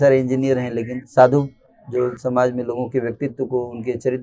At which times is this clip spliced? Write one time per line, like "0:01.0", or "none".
0:01.0
0:02.2